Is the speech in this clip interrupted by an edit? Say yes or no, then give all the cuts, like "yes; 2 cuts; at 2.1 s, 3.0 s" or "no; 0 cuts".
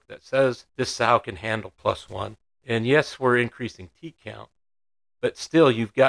yes; 1 cut; at 2.5 s